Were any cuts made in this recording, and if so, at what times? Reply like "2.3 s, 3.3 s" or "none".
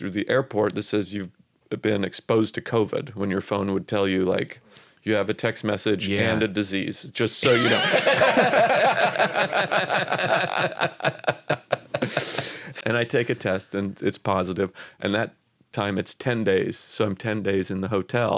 12.6 s